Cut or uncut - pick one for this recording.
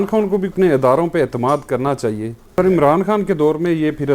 cut